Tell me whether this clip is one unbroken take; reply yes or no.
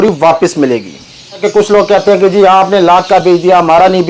no